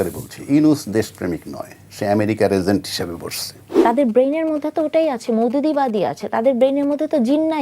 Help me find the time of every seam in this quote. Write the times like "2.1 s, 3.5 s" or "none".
3.7 s